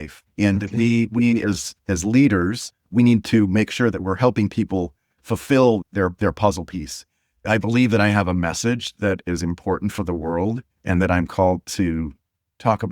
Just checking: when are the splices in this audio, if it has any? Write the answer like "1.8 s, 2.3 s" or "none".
5.8 s, 7.4 s